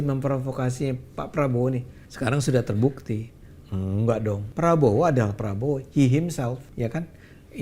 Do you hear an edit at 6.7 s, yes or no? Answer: yes